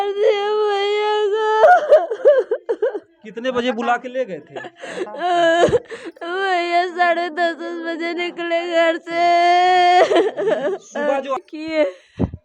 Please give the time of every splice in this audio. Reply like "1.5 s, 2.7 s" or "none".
11.4 s